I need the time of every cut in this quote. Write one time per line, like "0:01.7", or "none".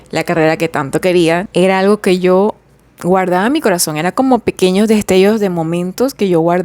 0:01.4